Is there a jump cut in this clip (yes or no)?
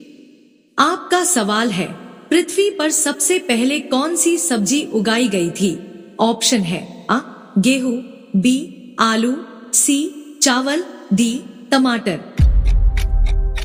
no